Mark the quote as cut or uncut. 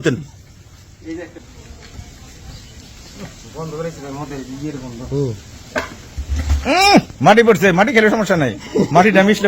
cut